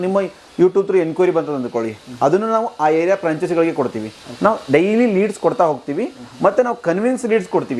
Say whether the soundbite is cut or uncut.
uncut